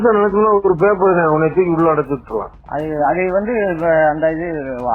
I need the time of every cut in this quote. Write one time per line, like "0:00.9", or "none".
0:02.6